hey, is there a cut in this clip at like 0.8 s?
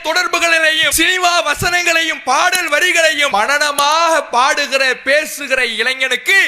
yes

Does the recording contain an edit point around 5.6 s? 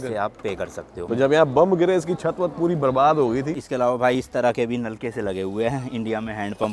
no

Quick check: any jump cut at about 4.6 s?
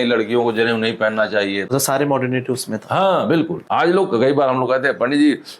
no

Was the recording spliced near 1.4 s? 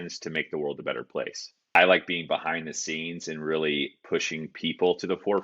yes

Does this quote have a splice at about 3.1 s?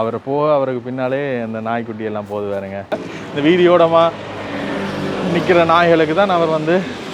yes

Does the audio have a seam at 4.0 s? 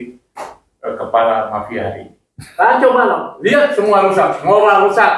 no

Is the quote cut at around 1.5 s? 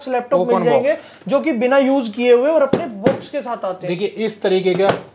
no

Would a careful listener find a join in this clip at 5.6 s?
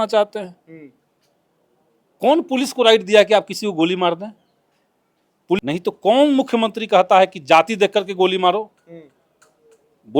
yes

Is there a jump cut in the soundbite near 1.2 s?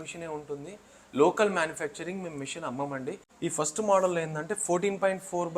no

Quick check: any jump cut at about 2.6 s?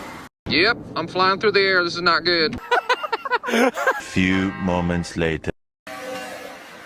yes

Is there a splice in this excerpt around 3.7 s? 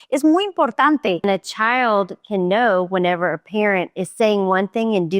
no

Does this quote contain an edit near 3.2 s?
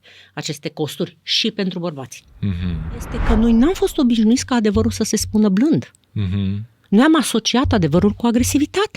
yes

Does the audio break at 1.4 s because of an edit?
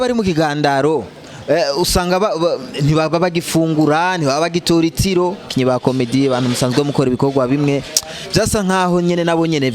no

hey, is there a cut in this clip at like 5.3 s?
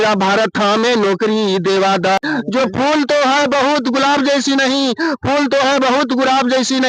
no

